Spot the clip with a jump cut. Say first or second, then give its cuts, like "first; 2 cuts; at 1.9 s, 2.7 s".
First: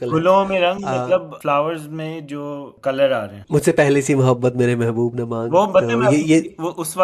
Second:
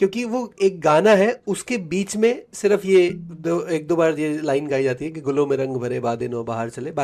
first; 3 cuts; at 1.3 s, 2.7 s, 3.4 s